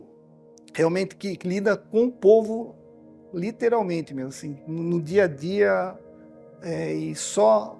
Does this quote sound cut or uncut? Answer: uncut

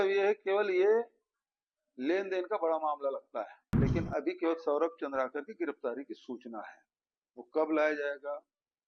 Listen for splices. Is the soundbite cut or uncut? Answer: cut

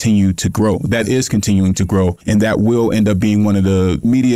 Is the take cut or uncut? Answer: cut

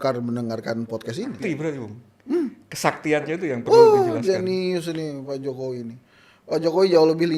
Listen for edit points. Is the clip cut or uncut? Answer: cut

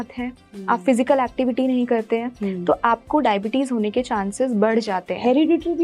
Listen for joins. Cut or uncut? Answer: uncut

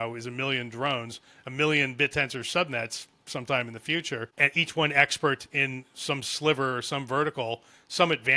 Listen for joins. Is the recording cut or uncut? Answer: cut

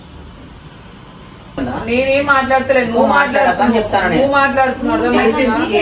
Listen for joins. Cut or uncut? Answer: cut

